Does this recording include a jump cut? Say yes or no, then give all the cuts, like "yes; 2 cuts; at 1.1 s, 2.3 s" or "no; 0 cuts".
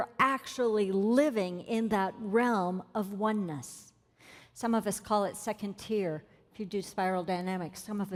no; 0 cuts